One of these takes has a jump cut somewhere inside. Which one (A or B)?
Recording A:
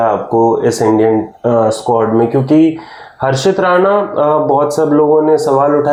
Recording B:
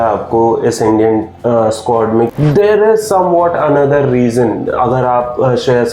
B